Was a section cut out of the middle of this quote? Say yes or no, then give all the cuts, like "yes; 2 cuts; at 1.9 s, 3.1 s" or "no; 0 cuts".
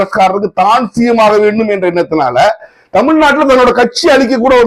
no; 0 cuts